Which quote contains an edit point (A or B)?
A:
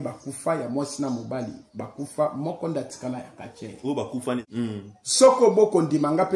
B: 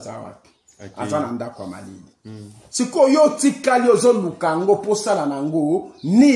A